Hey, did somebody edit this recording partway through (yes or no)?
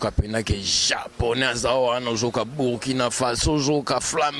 no